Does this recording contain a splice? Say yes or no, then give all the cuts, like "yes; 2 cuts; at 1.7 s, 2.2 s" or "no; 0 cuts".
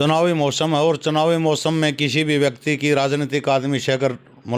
no; 0 cuts